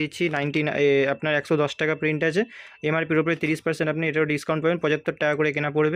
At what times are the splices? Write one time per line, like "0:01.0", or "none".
none